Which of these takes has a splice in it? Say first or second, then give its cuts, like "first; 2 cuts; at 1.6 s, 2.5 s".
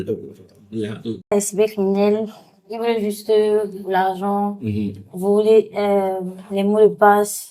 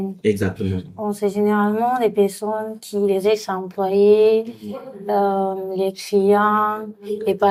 first; 1 cut; at 1.3 s